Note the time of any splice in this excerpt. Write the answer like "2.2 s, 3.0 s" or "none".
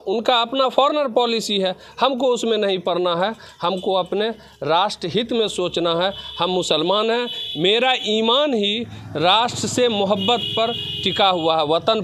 none